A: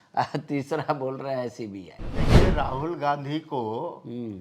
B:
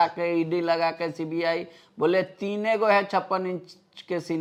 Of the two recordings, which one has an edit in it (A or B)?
A